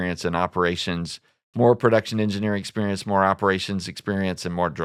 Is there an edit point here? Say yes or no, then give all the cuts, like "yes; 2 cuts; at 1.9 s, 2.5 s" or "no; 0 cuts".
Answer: no; 0 cuts